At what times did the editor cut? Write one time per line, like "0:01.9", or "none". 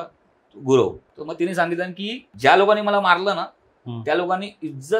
0:01.1
0:02.2